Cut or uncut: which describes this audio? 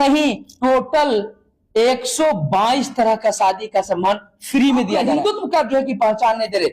cut